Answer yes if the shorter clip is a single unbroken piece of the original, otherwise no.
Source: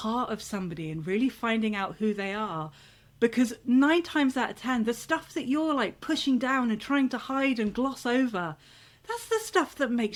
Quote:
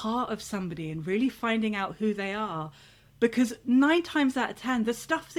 yes